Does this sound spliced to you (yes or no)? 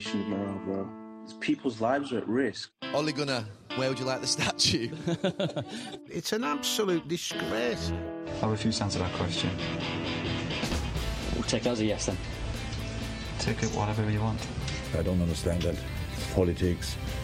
no